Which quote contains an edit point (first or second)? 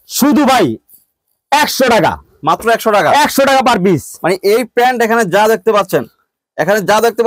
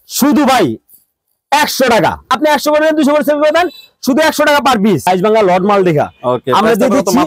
second